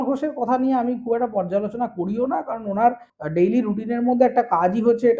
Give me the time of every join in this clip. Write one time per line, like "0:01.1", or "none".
0:03.1